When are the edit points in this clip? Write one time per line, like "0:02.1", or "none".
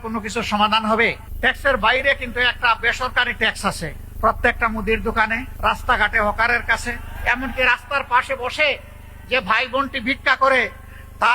0:01.3
0:04.0
0:05.5
0:07.1